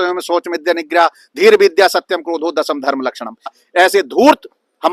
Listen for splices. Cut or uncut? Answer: cut